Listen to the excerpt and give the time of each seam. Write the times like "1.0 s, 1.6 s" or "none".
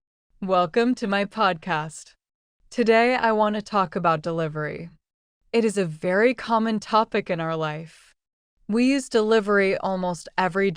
1.2 s

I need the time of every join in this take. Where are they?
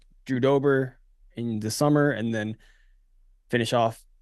none

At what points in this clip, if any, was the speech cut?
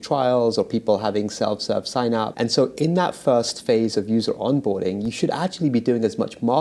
2.3 s

